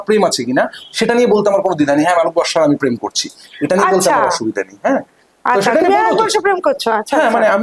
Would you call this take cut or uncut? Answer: uncut